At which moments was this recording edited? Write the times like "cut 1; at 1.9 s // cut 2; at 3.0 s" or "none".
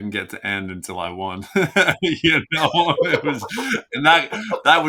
none